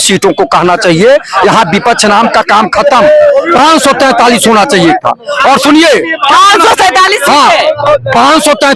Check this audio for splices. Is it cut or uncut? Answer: uncut